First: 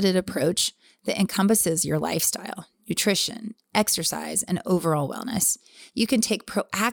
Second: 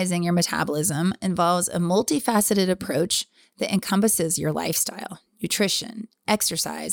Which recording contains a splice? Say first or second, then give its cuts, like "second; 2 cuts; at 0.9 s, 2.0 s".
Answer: first; 1 cut; at 5.8 s